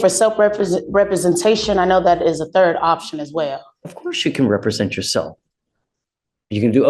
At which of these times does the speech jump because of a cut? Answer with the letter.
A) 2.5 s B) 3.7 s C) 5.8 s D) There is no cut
D